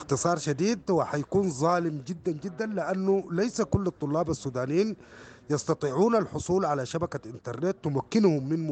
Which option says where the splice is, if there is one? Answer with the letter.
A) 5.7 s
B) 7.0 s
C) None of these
C